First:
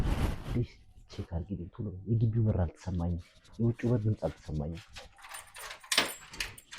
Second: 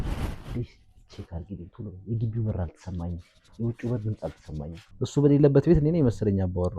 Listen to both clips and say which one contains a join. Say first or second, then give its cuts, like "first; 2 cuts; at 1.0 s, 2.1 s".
second; 1 cut; at 4.9 s